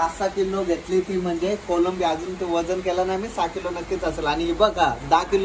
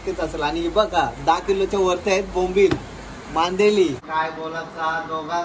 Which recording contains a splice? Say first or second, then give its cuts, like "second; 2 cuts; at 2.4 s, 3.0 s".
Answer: second; 1 cut; at 4.0 s